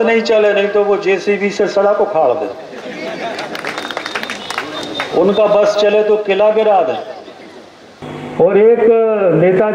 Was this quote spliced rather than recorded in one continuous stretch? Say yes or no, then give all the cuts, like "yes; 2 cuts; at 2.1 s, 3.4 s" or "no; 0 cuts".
yes; 1 cut; at 8.0 s